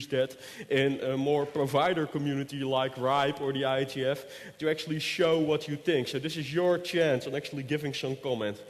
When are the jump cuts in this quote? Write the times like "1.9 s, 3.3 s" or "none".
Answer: 6.6 s